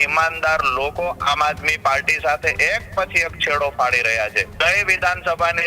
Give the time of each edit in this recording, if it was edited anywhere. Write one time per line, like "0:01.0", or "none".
0:04.4